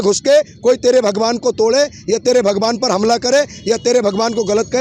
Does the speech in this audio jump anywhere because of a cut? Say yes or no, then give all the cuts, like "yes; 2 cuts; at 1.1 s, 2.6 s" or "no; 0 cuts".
no; 0 cuts